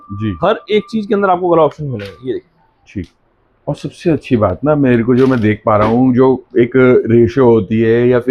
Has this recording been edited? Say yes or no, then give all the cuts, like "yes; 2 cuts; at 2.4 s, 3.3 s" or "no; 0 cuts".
no; 0 cuts